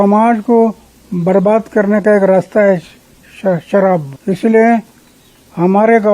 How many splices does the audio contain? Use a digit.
1